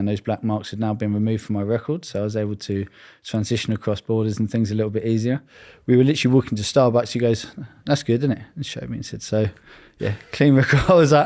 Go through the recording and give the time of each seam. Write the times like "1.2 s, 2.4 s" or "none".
none

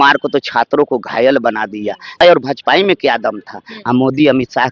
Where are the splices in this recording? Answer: 2.2 s

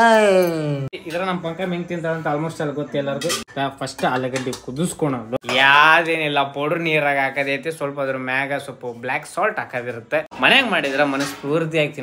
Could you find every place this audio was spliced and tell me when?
1.0 s, 3.5 s, 5.3 s, 10.3 s

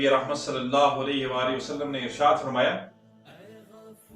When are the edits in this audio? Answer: 3.3 s

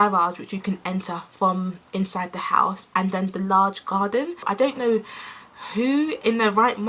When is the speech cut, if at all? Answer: 4.4 s

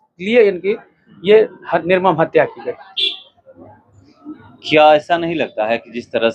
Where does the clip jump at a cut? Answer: none

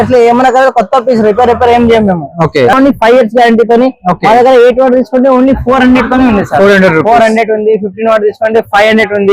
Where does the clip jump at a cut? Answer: 2.7 s

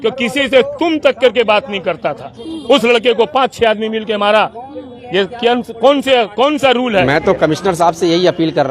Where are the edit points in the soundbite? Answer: 7.0 s

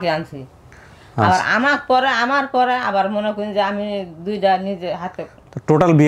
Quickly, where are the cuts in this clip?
none

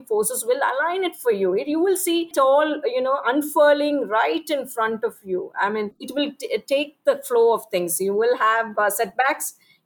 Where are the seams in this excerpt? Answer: none

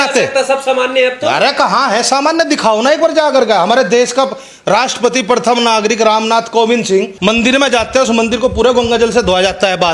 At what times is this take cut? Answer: 7.1 s

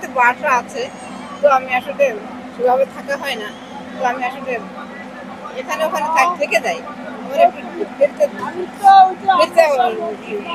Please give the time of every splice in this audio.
none

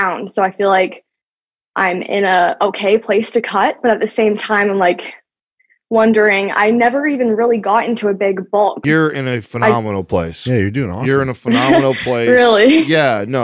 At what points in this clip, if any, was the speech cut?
8.8 s

